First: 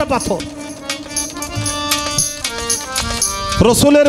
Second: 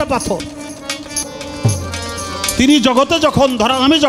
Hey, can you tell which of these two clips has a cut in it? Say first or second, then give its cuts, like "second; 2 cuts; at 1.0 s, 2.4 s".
second; 1 cut; at 1.3 s